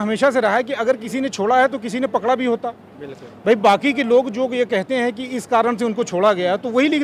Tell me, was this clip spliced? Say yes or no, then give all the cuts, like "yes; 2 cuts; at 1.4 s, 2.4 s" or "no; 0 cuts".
no; 0 cuts